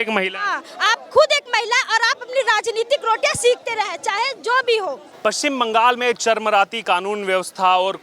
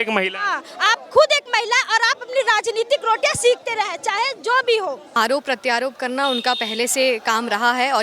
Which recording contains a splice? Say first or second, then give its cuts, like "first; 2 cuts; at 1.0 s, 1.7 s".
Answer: second; 1 cut; at 5.2 s